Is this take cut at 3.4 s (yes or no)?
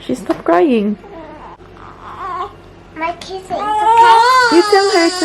no